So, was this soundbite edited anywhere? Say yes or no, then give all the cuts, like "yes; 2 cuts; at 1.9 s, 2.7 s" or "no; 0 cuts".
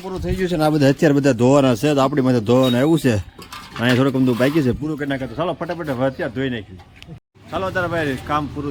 no; 0 cuts